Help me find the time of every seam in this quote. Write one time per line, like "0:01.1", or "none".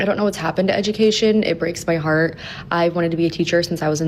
none